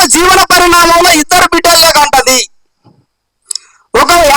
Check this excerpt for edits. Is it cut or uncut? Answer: uncut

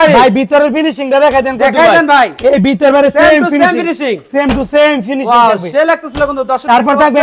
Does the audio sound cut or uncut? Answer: uncut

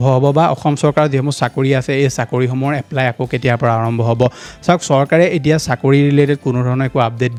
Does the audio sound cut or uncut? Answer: uncut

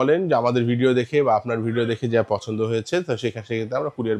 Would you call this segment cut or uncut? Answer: uncut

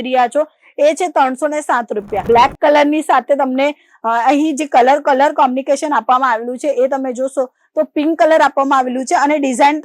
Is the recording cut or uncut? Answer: cut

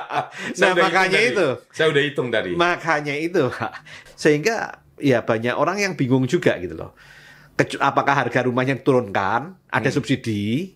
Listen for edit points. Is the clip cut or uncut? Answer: cut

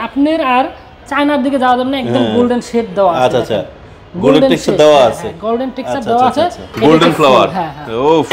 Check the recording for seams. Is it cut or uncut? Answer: cut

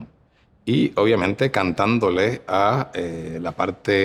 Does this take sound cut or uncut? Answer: uncut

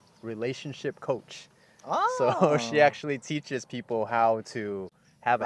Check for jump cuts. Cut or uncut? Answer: uncut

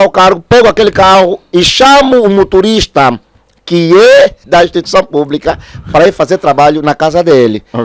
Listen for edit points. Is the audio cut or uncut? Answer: uncut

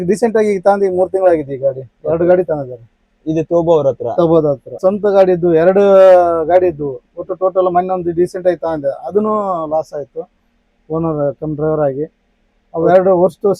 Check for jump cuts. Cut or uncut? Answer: cut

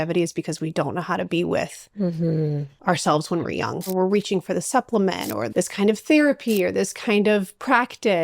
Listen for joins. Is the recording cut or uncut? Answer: cut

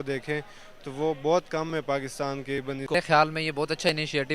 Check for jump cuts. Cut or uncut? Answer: cut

